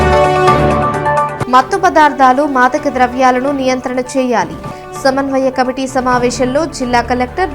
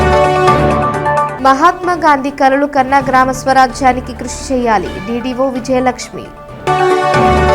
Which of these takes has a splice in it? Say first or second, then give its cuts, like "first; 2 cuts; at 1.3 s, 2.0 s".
first; 1 cut; at 1.3 s